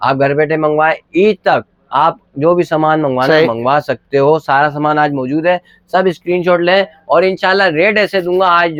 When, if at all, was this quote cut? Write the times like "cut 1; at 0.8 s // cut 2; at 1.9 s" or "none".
none